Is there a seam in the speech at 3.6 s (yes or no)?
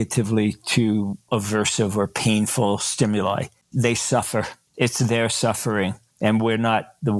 yes